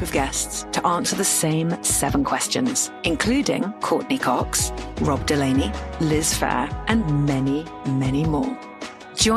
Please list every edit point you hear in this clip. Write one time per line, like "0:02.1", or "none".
none